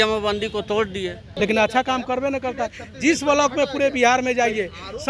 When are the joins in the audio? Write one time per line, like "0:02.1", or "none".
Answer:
0:01.2